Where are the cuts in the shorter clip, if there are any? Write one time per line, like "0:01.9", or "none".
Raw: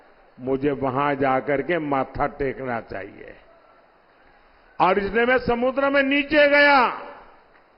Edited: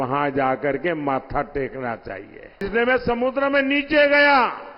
0:02.6